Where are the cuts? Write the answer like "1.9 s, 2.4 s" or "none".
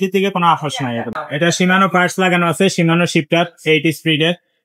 1.2 s